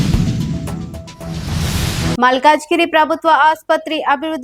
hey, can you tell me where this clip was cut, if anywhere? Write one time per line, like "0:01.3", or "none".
none